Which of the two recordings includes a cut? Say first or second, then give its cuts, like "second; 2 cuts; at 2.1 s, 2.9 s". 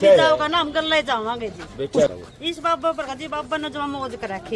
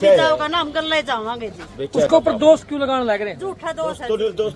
first; 1 cut; at 2.1 s